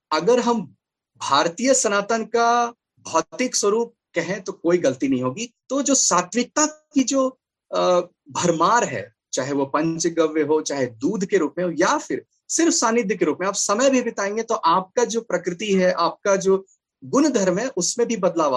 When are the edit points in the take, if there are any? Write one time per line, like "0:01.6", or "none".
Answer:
0:05.5